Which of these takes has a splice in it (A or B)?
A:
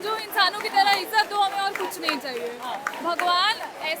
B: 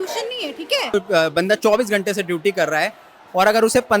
B